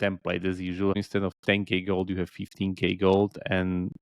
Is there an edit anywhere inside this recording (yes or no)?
yes